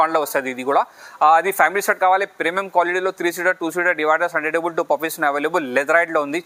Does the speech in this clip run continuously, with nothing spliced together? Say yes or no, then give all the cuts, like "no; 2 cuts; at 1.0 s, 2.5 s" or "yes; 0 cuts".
yes; 0 cuts